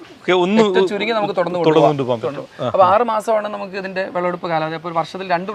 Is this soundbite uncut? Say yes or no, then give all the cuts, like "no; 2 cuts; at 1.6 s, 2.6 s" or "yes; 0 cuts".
yes; 0 cuts